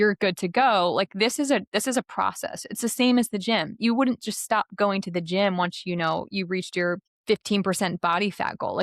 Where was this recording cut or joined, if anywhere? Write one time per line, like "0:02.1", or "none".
0:07.1